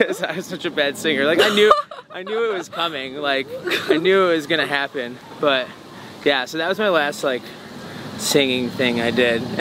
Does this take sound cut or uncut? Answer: uncut